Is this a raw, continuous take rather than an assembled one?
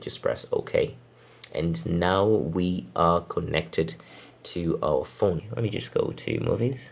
no; 1 cut; at 5.5 s

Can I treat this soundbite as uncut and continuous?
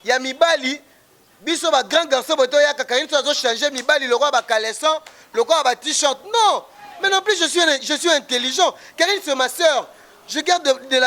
yes; 0 cuts

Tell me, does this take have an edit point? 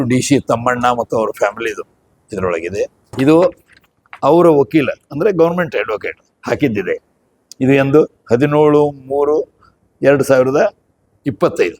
yes; 1 cut; at 3.0 s

